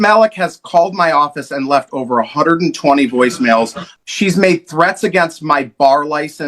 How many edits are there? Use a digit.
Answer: 1